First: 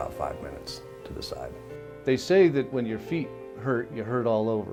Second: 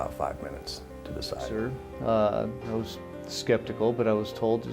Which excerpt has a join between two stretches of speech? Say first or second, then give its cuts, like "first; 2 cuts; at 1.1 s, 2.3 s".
second; 1 cut; at 1.8 s